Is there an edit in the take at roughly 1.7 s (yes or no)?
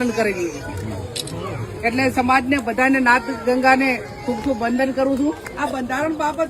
no